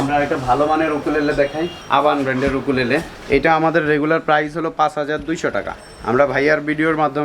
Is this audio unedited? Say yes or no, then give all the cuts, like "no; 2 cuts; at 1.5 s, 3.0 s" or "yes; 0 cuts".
no; 2 cuts; at 1.8 s, 3.1 s